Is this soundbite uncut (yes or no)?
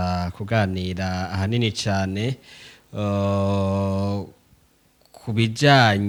yes